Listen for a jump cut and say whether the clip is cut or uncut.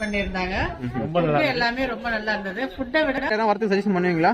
cut